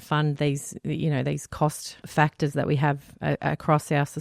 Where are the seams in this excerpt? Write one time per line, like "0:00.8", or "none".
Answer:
0:02.0